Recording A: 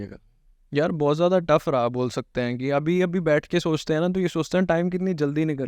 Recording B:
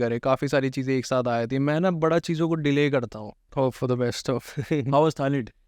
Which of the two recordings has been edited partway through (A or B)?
B